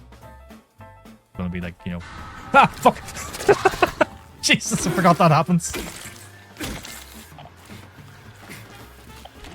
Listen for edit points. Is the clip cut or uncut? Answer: cut